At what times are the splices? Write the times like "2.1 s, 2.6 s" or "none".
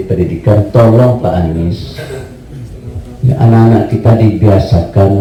none